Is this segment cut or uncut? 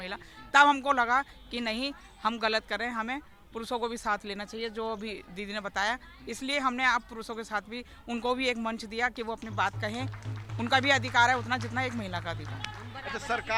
uncut